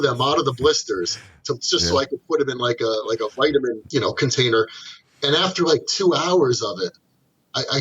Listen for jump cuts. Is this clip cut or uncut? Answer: cut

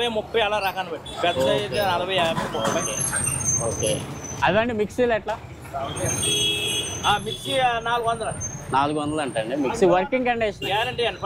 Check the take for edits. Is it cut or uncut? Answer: uncut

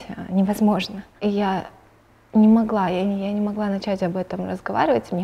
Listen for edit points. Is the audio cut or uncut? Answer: cut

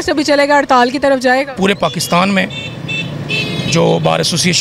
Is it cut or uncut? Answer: cut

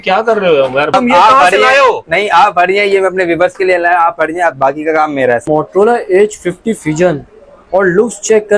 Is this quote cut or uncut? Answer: cut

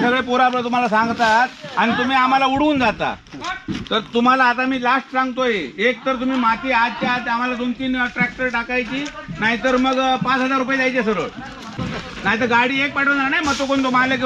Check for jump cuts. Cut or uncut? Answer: cut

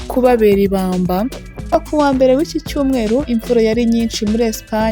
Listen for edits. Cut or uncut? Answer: cut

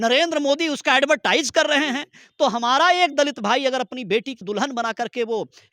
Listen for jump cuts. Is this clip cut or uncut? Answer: cut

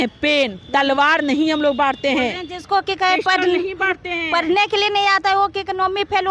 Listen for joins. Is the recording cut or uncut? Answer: uncut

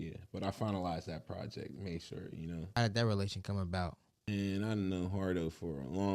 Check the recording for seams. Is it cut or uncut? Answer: cut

